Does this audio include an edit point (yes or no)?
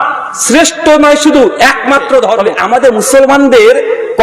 yes